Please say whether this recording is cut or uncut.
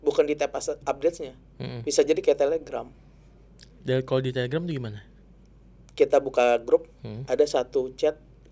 uncut